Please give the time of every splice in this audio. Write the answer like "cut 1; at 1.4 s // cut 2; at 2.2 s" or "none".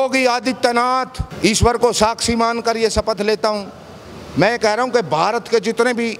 cut 1; at 1.2 s